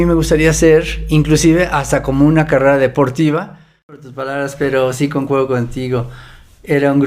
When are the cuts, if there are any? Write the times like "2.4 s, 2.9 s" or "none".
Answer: 4.1 s